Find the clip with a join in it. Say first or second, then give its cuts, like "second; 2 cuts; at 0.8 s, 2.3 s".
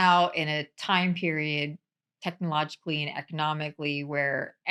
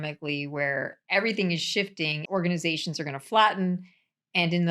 second; 1 cut; at 2.2 s